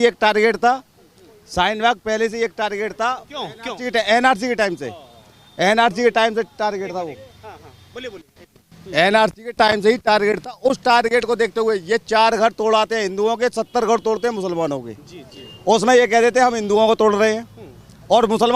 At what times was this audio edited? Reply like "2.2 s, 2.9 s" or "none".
none